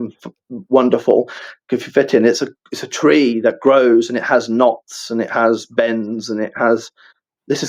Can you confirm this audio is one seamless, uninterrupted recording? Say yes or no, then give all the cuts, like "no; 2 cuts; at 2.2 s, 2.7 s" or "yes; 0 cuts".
yes; 0 cuts